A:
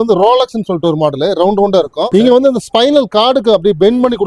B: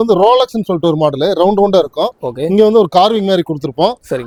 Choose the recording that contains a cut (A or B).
A